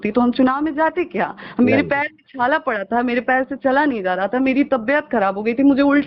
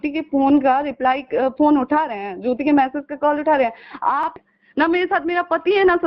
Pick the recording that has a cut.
second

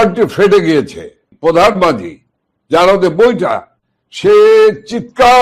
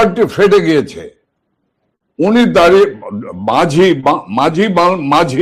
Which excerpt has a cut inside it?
first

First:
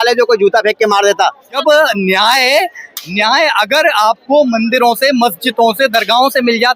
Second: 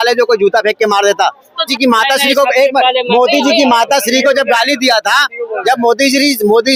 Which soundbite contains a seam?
first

